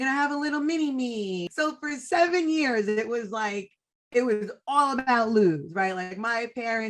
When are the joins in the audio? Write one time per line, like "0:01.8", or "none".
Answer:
0:01.5